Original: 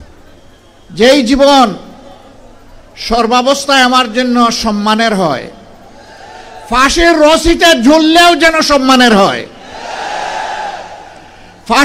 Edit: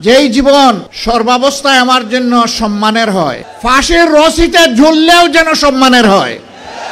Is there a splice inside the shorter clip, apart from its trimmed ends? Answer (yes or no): yes